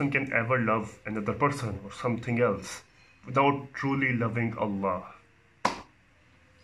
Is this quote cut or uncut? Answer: uncut